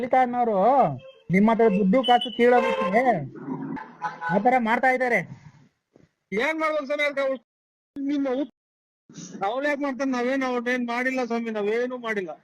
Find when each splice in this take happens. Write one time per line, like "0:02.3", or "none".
0:01.1
0:03.8

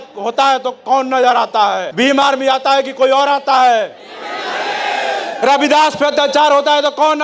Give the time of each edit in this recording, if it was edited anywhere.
0:01.9

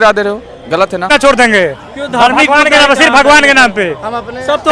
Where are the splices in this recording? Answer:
0:01.1

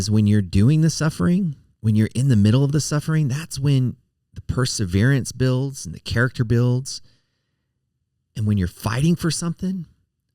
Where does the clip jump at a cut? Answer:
0:01.7

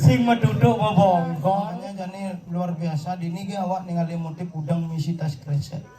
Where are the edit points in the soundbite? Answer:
0:02.3

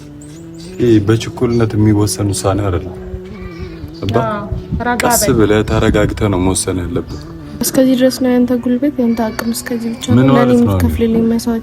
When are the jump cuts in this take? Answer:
0:07.7

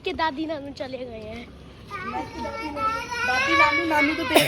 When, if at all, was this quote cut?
none

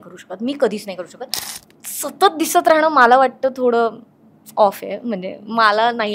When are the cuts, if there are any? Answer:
0:01.4

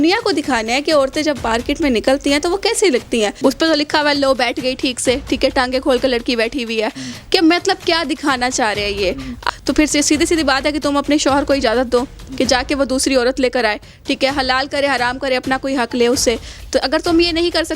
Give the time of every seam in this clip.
0:03.3
0:09.5

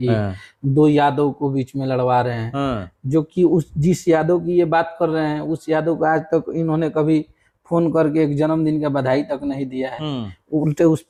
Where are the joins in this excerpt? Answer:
none

